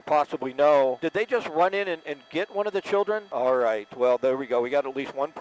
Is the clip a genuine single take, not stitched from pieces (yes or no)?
no